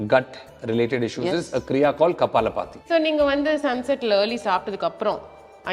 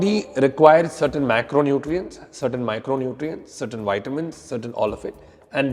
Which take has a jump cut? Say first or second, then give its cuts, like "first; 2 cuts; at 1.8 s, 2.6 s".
first; 1 cut; at 2.8 s